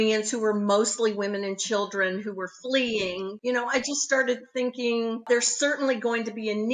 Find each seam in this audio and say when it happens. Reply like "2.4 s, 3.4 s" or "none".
3.4 s, 5.3 s